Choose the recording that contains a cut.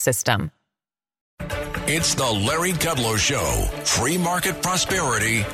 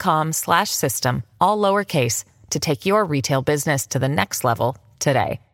first; 1 cut; at 1.4 s

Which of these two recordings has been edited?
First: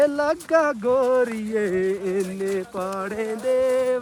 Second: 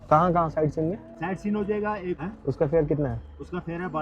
second; 2 cuts; at 1.1 s, 2.2 s

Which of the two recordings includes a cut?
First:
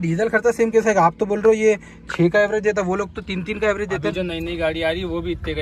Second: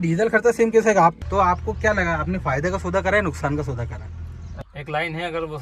second; 2 cuts; at 1.2 s, 4.6 s

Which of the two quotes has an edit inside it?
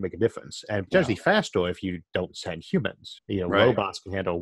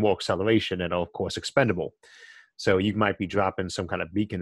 first; 1 cut; at 3.1 s

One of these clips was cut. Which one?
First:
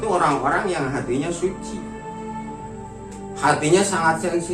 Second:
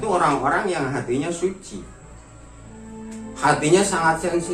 first; 2 cuts; at 1.6 s, 3.4 s

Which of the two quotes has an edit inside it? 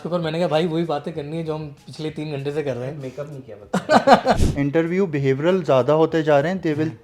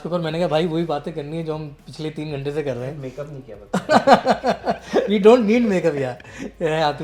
first; 1 cut; at 4.5 s

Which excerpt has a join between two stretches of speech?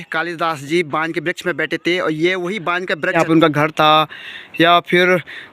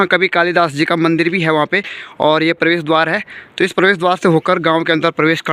first; 1 cut; at 3.2 s

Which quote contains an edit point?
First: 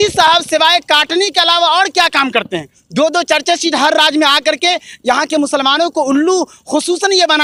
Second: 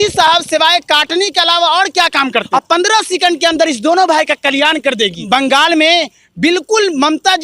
second; 2 cuts; at 2.5 s, 5.2 s

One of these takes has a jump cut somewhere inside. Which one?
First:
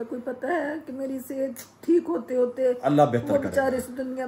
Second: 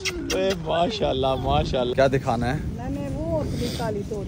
second; 1 cut; at 1.9 s

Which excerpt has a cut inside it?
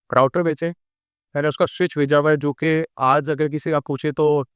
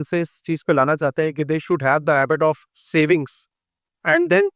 second; 1 cut; at 2.7 s

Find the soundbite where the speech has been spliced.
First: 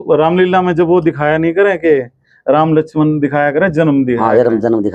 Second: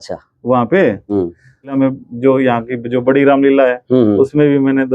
second; 1 cut; at 1.7 s

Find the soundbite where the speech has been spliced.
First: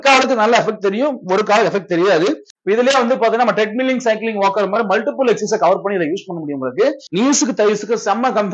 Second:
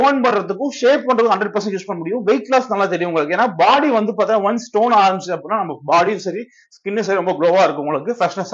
first; 2 cuts; at 2.5 s, 7.0 s

